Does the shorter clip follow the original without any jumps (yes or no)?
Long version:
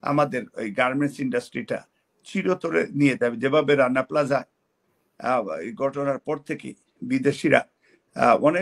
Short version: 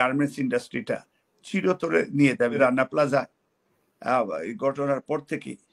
no